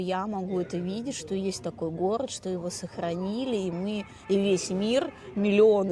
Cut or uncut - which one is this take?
uncut